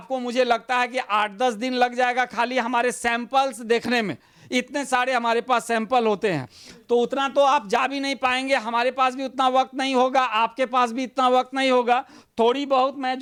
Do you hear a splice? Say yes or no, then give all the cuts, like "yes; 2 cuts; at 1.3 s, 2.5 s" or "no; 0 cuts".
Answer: no; 0 cuts